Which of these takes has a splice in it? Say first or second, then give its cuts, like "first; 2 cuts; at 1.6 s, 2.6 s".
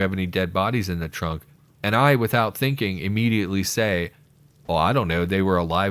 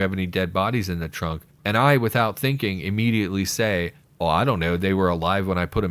second; 2 cuts; at 1.5 s, 4.0 s